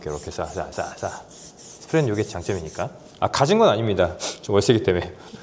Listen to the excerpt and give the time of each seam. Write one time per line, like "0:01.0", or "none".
0:03.0